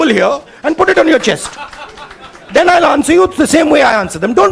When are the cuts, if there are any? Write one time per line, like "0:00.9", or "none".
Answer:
none